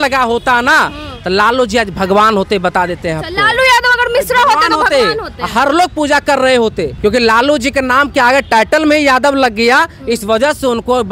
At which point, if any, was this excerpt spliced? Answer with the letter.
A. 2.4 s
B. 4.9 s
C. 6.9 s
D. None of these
C